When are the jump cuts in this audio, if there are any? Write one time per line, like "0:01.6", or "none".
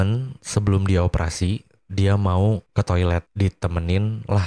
0:02.9